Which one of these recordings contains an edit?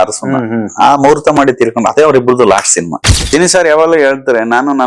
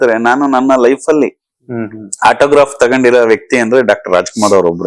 first; 1 cut; at 3.3 s

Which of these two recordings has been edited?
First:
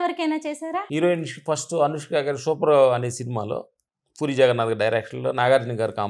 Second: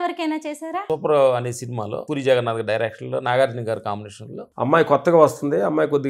second; 2 cuts; at 0.8 s, 2.0 s

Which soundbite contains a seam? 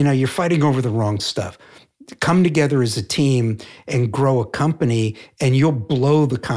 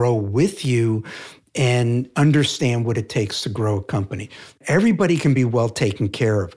second; 2 cuts; at 2.1 s, 4.6 s

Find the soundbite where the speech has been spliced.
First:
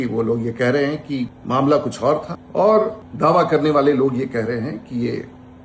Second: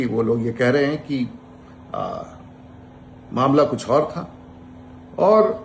first; 3 cuts; at 1.4 s, 2.4 s, 3.0 s

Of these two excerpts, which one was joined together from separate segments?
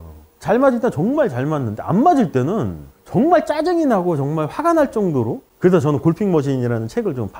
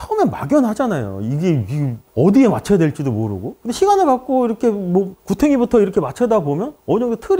first; 1 cut; at 5.4 s

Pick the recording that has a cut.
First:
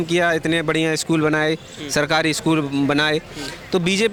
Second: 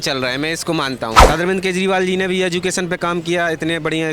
second; 1 cut; at 1.2 s

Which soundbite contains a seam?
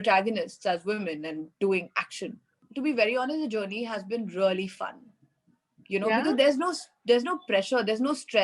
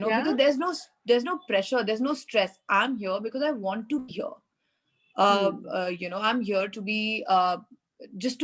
first; 1 cut; at 2.6 s

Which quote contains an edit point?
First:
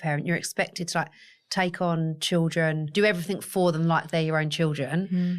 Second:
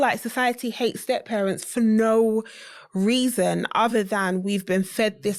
first; 1 cut; at 2.9 s

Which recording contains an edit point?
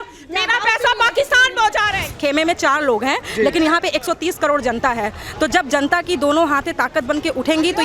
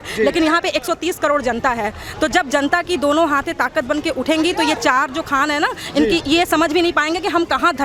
first; 1 cut; at 2.1 s

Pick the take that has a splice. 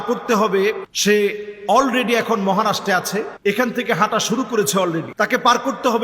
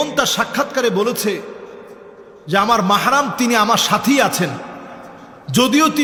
first; 3 cuts; at 0.9 s, 3.3 s, 5.1 s

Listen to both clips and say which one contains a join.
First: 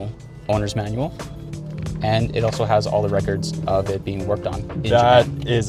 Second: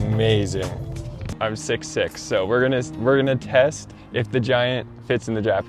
second; 1 cut; at 1.3 s

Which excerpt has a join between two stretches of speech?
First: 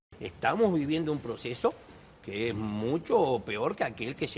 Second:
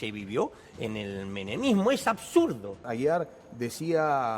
second; 1 cut; at 2.8 s

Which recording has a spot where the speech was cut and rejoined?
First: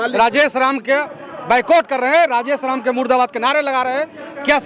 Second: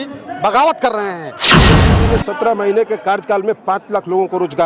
second; 1 cut; at 1.8 s

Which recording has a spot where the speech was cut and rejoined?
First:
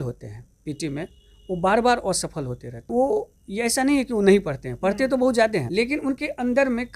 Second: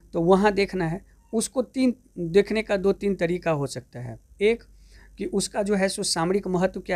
first; 2 cuts; at 2.7 s, 5.7 s

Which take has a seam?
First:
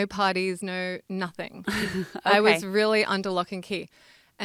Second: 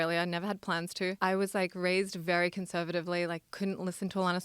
second; 1 cut; at 1.2 s

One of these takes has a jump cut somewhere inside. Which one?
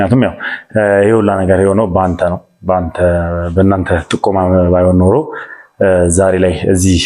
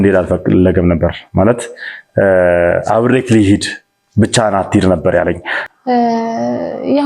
second; 1 cut; at 5.5 s

